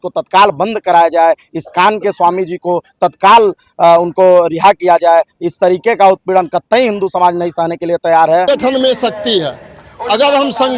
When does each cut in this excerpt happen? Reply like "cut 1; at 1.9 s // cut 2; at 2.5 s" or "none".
cut 1; at 8.5 s